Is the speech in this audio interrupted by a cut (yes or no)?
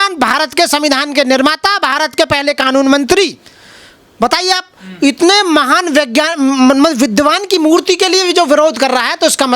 no